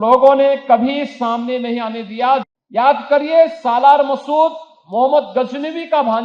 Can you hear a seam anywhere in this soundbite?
yes; 1 cut; at 2.5 s

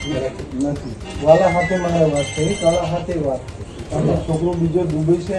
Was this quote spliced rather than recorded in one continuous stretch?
yes; 2 cuts; at 1.1 s, 3.8 s

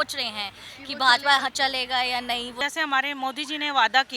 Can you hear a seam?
yes; 1 cut; at 2.6 s

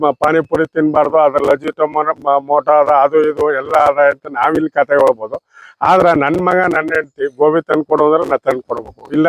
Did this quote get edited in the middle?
no; 0 cuts

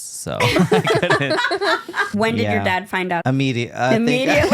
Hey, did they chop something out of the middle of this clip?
yes; 2 cuts; at 2.1 s, 3.2 s

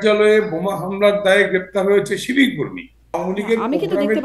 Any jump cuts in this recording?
yes; 1 cut; at 3.2 s

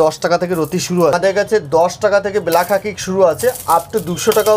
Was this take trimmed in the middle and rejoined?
yes; 1 cut; at 1.1 s

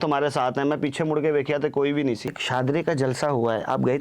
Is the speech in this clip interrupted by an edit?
yes; 1 cut; at 2.4 s

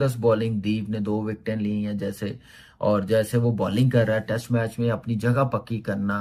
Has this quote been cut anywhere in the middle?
no; 0 cuts

